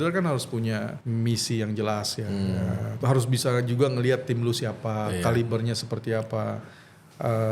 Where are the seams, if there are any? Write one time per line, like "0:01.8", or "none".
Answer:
0:01.0
0:03.0